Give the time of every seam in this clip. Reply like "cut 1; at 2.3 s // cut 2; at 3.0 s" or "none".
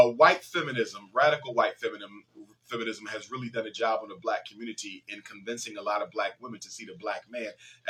none